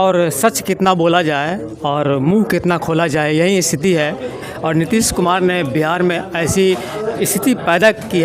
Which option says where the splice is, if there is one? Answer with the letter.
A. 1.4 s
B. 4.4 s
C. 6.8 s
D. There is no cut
B